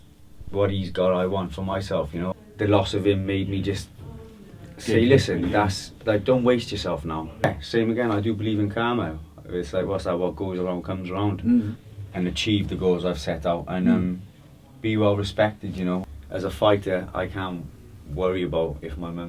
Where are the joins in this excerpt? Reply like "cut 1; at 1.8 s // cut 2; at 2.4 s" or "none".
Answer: cut 1; at 2.3 s // cut 2; at 7.4 s // cut 3; at 11.9 s // cut 4; at 16.0 s